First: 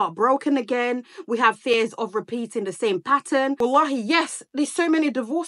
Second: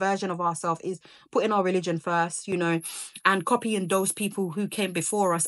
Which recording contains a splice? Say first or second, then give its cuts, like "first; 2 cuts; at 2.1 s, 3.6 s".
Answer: first; 1 cut; at 3.6 s